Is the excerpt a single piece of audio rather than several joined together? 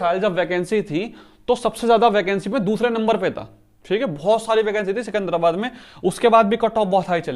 yes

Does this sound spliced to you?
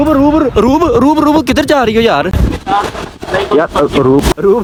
no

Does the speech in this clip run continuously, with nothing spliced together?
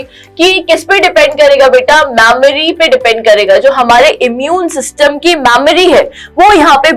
yes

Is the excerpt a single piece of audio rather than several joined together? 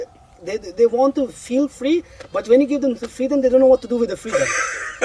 yes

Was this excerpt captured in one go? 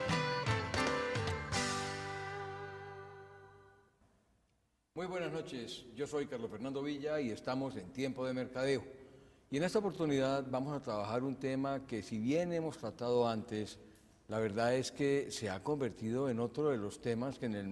yes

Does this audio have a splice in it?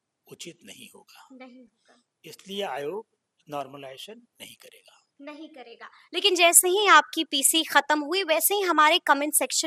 no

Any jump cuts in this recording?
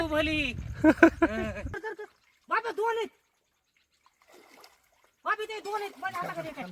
yes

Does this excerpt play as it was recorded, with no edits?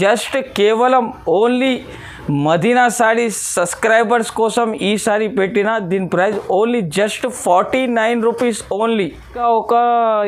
yes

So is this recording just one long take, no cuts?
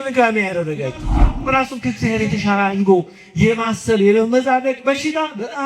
no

